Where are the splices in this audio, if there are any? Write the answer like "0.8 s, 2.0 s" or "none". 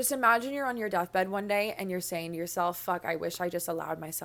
none

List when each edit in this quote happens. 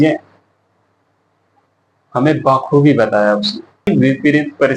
3.9 s

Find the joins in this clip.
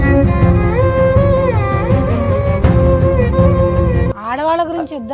4.1 s

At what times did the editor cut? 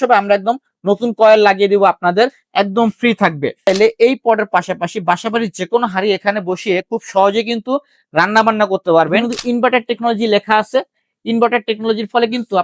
3.7 s, 9.2 s

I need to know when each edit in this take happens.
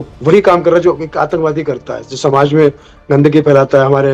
none

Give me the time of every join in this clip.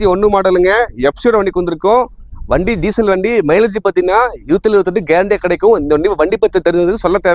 none

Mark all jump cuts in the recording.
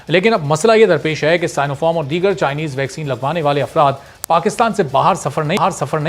none

